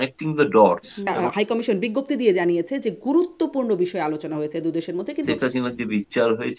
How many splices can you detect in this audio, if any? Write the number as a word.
two